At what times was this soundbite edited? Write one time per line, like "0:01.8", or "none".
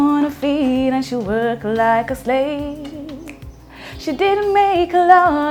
none